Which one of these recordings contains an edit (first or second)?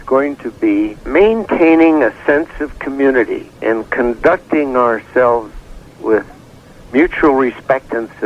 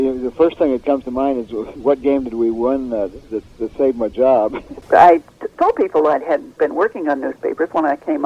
second